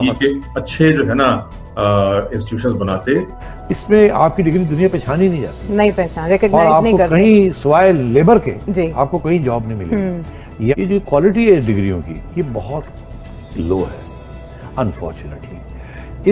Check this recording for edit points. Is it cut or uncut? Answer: cut